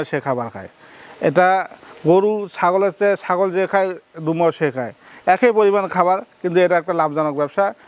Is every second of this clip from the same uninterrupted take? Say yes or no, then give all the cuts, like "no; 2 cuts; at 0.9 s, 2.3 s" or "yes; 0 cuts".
yes; 0 cuts